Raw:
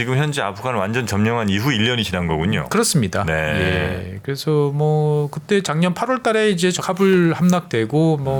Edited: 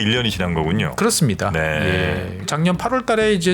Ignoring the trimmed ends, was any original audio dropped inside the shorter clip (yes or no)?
yes